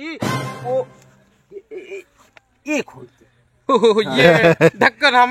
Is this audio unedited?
yes; 0 cuts

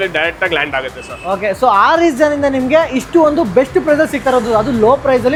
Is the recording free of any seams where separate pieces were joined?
yes; 0 cuts

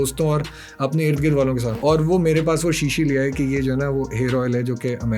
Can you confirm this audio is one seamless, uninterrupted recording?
no; 1 cut; at 1.8 s

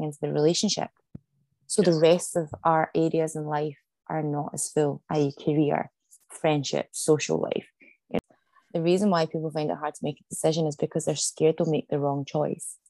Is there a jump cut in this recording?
yes; 1 cut; at 8.2 s

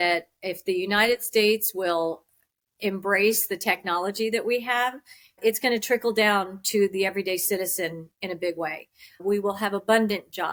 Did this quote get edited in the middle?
no; 0 cuts

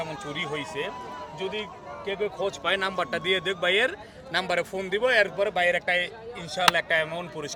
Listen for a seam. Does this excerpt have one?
no; 0 cuts

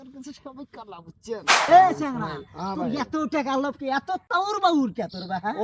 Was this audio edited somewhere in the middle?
yes; 2 cuts; at 1.5 s, 4.2 s

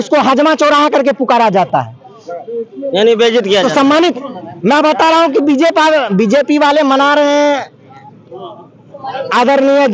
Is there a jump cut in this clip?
no; 0 cuts

